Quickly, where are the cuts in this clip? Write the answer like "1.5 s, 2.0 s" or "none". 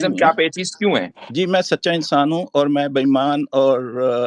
1.2 s